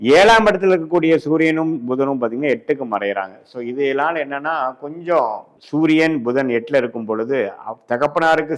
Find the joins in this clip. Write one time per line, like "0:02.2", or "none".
0:05.6